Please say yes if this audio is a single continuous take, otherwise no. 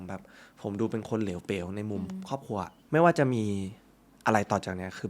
no